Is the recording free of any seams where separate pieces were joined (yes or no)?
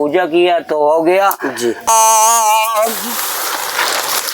no